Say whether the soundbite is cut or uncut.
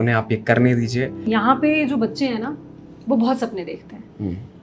cut